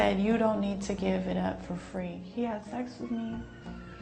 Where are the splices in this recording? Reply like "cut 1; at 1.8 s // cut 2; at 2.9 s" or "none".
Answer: cut 1; at 2.1 s